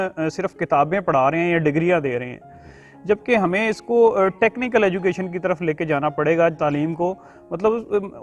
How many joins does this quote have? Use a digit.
0